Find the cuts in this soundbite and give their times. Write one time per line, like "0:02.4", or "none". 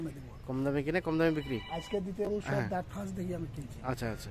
0:02.2